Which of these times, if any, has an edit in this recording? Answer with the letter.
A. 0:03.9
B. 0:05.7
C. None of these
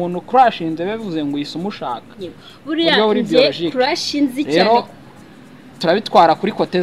C